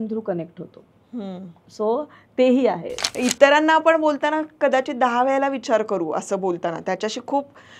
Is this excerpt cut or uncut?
cut